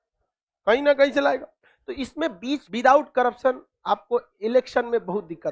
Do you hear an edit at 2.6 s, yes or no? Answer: yes